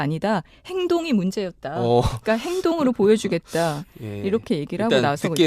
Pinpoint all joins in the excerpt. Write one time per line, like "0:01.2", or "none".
none